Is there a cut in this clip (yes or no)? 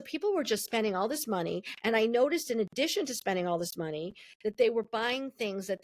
no